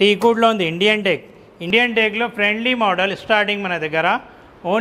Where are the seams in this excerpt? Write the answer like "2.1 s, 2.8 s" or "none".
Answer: 1.6 s